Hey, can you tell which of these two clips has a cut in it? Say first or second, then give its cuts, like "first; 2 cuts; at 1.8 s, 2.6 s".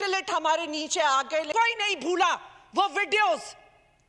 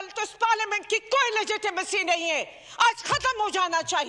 first; 1 cut; at 1.5 s